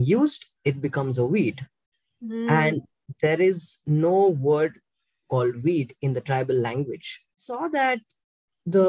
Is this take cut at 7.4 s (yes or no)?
yes